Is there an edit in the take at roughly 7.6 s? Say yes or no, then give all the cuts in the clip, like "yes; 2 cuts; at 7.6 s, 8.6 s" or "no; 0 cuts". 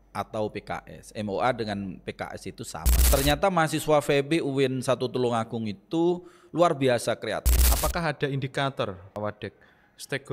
yes; 2 cuts; at 2.9 s, 7.6 s